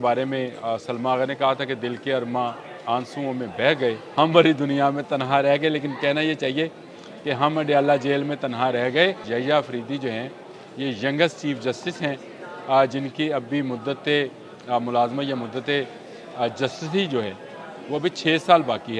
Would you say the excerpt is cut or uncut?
cut